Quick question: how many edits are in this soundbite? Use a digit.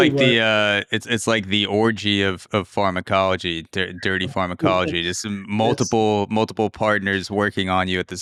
0